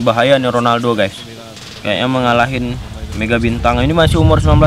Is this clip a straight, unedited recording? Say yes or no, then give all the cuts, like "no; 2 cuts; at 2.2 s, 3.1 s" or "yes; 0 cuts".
yes; 0 cuts